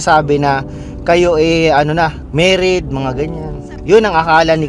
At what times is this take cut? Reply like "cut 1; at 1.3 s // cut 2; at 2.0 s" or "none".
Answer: cut 1; at 2.2 s